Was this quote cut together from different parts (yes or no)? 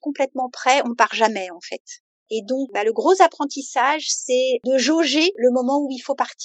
yes